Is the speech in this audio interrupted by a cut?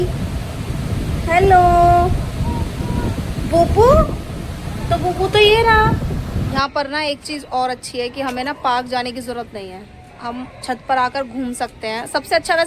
yes; 1 cut; at 6.5 s

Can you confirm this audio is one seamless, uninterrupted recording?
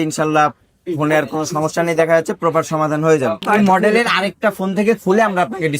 no; 1 cut; at 3.5 s

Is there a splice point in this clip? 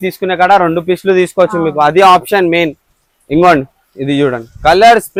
no; 0 cuts

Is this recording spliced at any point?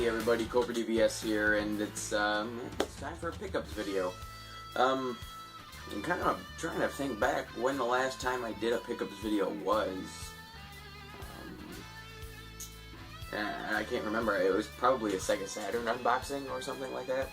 yes; 1 cut; at 4.9 s

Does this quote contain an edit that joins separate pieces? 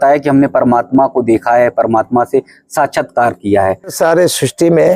yes; 1 cut; at 3.9 s

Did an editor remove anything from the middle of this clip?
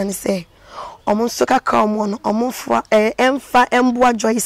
no; 0 cuts

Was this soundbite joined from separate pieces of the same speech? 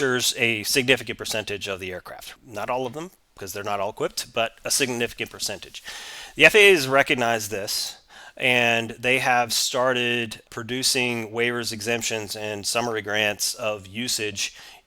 yes; 1 cut; at 2.2 s

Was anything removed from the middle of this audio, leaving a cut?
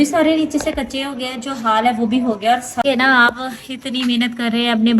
yes; 1 cut; at 2.8 s

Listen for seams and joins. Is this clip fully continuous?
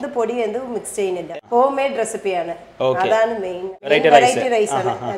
no; 2 cuts; at 1.3 s, 3.9 s

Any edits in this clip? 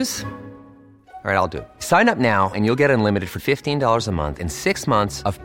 no; 0 cuts

